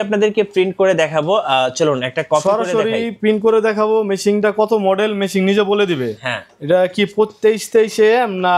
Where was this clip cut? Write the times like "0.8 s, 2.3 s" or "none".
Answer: none